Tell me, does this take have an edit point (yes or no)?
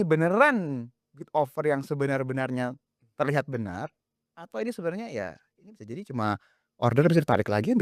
no